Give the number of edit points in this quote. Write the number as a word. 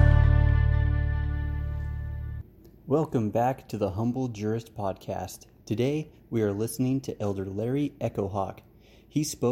one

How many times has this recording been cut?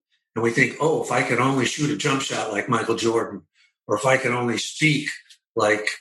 zero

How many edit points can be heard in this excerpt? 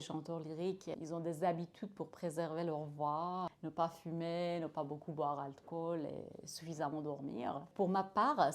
three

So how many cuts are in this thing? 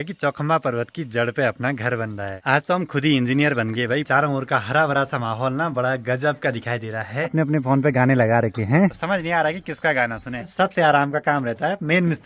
four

